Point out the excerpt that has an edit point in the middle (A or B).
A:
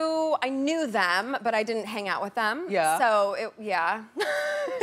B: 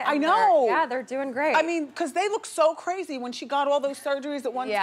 A